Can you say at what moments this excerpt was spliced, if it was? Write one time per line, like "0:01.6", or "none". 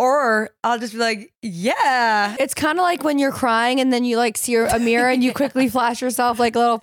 0:02.4